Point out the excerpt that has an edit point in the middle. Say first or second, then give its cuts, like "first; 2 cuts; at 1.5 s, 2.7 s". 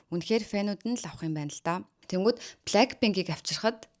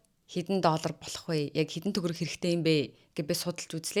first; 1 cut; at 1.9 s